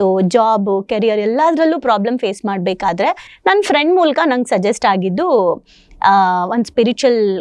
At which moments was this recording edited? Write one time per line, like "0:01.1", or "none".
none